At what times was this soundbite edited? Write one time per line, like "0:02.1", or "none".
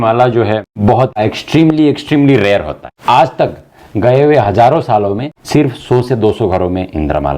0:01.2
0:02.9
0:05.3